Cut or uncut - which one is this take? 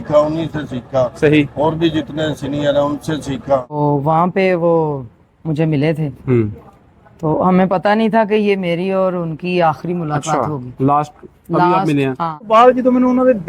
cut